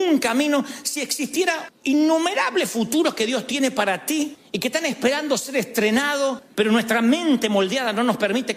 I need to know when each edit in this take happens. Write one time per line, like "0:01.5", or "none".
none